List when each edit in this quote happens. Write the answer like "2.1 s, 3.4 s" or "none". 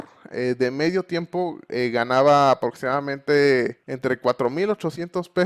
3.8 s